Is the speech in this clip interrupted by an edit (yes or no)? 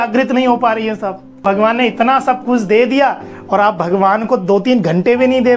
yes